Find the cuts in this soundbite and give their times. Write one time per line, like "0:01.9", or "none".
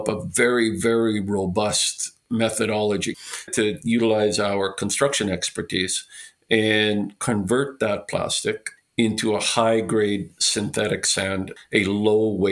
0:03.5